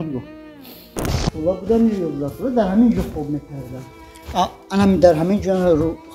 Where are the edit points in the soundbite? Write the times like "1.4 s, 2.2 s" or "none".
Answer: 1.1 s